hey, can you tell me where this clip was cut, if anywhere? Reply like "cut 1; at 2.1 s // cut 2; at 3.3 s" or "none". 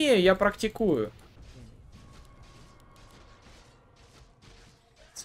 cut 1; at 1.3 s

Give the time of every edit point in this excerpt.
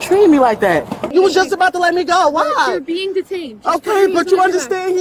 cut 1; at 1.1 s

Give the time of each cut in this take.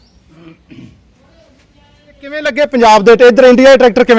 cut 1; at 2.4 s

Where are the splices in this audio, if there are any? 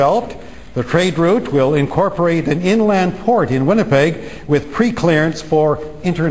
none

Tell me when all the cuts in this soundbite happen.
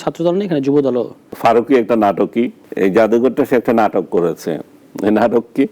cut 1; at 1.2 s // cut 2; at 2.6 s

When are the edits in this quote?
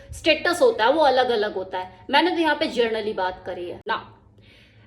cut 1; at 3.9 s

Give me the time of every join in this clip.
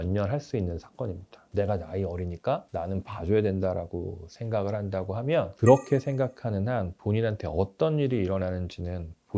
cut 1; at 1.5 s // cut 2; at 5.5 s

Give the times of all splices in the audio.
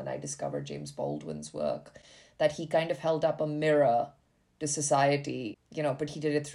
cut 1; at 5.6 s

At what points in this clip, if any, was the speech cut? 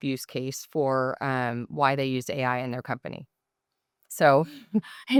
none

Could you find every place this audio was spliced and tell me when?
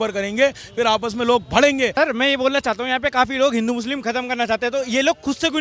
cut 1; at 1.9 s

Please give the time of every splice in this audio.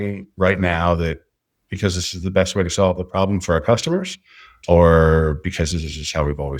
none

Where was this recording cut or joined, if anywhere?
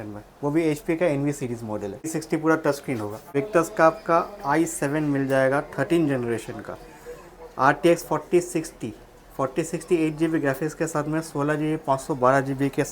cut 1; at 2.1 s // cut 2; at 3.2 s

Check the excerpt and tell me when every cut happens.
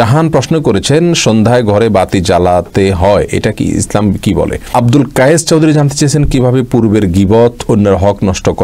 cut 1; at 4.6 s

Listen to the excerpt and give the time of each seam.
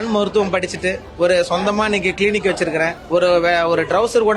cut 1; at 1.1 s

